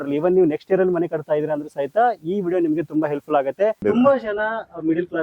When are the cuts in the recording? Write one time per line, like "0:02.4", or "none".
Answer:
0:03.8